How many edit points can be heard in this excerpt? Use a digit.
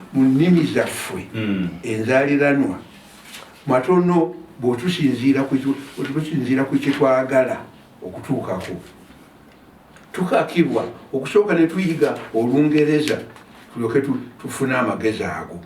0